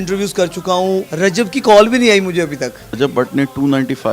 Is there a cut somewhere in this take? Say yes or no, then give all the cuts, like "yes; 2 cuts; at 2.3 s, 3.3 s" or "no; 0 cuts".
yes; 2 cuts; at 1.1 s, 3.0 s